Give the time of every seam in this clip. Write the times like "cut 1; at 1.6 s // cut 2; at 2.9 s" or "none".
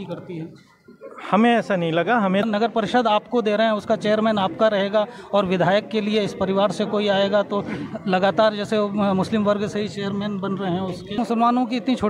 cut 1; at 2.4 s // cut 2; at 11.2 s